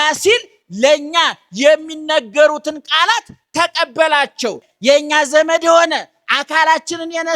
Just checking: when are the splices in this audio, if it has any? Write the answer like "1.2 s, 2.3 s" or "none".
4.7 s